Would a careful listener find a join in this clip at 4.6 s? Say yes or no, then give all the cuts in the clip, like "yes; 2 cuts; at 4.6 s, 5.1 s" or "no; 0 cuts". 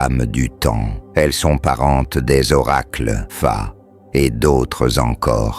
no; 2 cuts; at 1.0 s, 3.3 s